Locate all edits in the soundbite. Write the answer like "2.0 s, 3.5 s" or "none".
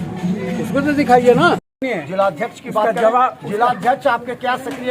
1.8 s